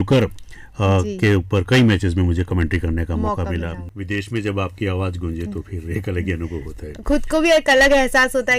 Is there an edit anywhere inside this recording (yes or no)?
yes